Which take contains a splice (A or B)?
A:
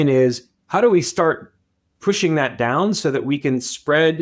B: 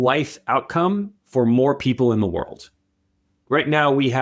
B